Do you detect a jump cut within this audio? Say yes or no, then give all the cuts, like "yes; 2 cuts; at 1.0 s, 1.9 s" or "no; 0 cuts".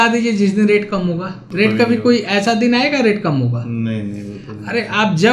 yes; 1 cut; at 1.4 s